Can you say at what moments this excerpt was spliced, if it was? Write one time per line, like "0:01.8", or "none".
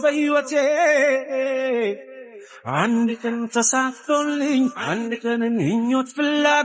none